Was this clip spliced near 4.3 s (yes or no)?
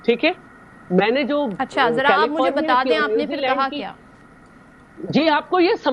no